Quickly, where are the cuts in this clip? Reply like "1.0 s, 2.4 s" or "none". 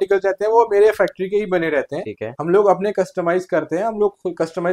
none